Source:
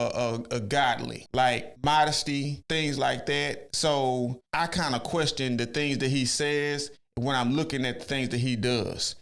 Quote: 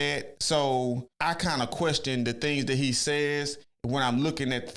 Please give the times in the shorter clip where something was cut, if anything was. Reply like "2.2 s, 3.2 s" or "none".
none